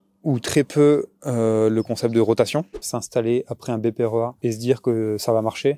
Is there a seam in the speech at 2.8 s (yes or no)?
yes